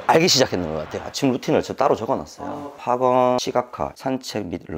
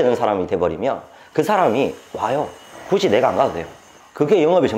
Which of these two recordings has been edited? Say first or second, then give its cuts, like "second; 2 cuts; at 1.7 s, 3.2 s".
first; 2 cuts; at 1.0 s, 3.8 s